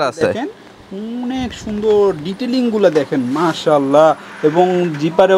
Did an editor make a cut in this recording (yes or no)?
no